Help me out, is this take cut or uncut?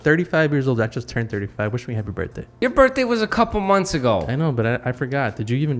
cut